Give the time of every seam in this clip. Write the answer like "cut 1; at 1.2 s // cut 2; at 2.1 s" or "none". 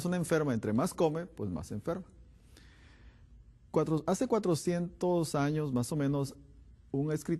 none